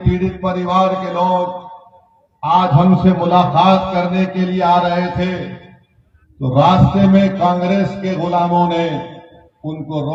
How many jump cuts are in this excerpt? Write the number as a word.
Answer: zero